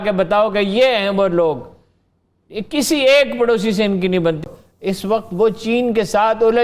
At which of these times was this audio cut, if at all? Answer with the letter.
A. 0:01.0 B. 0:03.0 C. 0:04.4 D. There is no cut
C